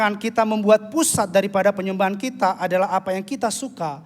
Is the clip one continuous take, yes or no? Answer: yes